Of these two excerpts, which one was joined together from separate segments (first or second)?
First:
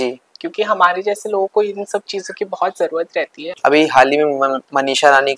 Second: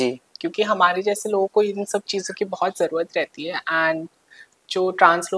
first